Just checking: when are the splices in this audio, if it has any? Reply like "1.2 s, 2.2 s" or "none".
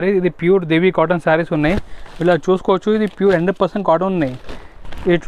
none